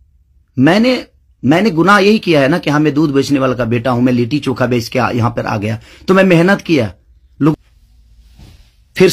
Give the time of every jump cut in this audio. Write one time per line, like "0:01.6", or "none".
0:07.5